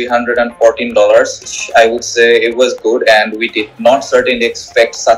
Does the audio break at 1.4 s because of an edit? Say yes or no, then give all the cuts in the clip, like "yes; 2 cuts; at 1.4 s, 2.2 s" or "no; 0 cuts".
yes; 1 cut; at 1.4 s